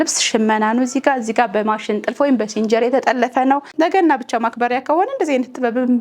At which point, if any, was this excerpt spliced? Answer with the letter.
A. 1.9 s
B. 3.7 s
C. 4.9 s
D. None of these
B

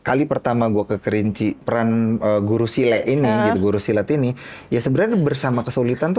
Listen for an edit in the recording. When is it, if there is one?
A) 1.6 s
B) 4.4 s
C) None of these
A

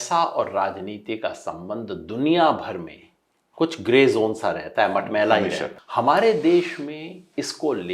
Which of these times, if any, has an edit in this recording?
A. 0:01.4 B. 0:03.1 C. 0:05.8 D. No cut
C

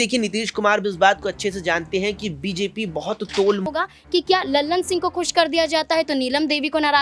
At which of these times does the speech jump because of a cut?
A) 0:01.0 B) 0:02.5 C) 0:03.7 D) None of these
C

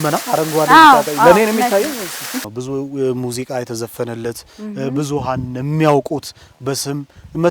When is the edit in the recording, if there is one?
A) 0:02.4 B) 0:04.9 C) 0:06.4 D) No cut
A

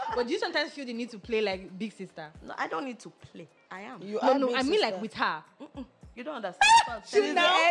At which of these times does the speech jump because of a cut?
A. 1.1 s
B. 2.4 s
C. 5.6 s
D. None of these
D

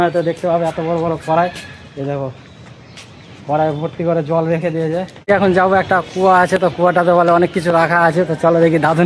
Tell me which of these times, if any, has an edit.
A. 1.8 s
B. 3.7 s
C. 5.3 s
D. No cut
C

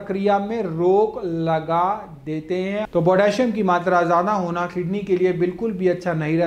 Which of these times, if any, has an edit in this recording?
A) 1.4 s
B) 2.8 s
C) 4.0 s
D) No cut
B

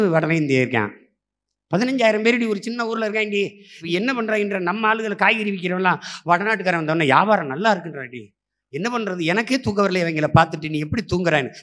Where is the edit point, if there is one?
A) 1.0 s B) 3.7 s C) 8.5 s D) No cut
B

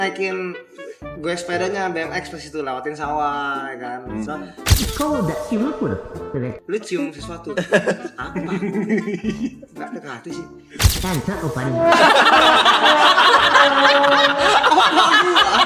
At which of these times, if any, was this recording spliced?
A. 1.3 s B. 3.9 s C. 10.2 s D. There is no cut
D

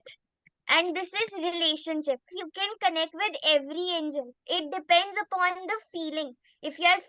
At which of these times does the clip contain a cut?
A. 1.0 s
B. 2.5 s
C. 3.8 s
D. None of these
B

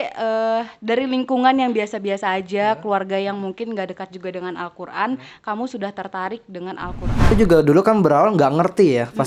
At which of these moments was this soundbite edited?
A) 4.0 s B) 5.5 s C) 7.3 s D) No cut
C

